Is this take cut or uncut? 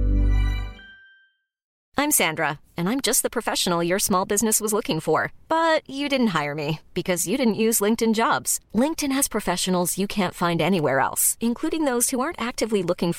cut